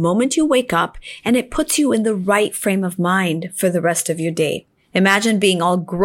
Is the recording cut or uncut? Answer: cut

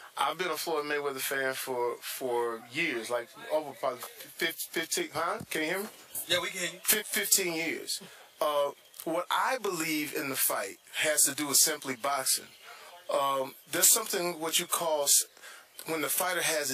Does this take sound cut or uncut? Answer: uncut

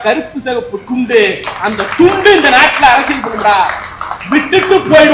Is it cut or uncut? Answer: uncut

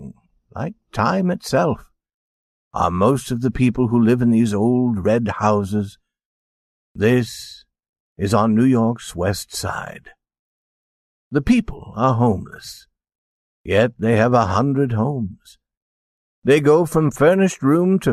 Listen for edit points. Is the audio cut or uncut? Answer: uncut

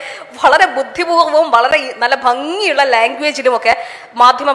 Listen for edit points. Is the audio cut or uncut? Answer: uncut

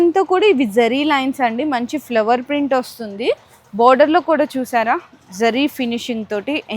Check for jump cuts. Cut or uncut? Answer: uncut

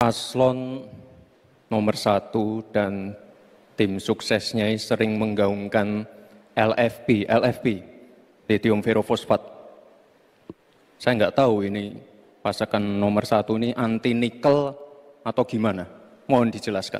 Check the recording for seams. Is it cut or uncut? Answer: uncut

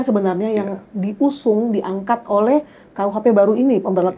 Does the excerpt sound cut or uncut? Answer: uncut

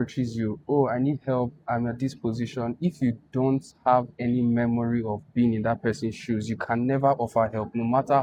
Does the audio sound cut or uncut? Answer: uncut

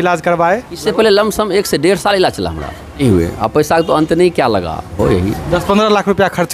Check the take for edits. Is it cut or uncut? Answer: cut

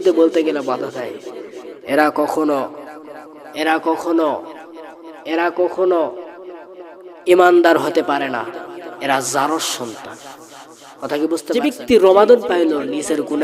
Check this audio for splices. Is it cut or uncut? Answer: cut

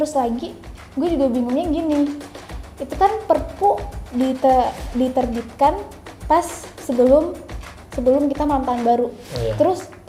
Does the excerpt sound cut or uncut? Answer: uncut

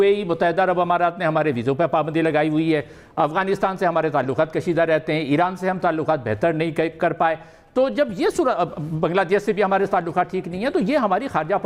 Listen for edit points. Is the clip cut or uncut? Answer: uncut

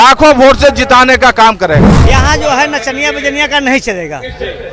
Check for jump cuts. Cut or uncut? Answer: cut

